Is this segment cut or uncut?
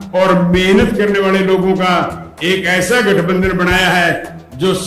uncut